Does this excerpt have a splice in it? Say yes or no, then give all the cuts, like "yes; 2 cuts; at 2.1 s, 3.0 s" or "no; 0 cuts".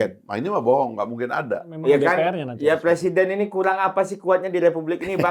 yes; 1 cut; at 1.7 s